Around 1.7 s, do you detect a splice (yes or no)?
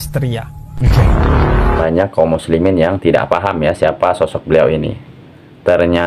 yes